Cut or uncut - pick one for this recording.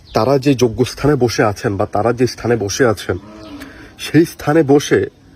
uncut